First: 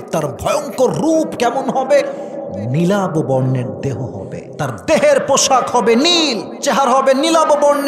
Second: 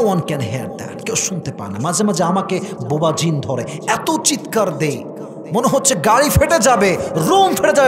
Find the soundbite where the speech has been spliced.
first; 2 cuts; at 4.5 s, 6.5 s

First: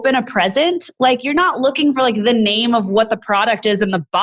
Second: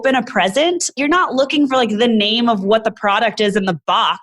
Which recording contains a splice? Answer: second; 1 cut; at 0.9 s

